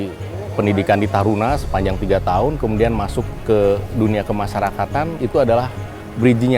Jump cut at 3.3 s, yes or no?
yes